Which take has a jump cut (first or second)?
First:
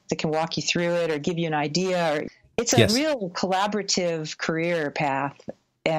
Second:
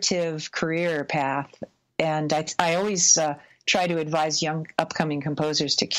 first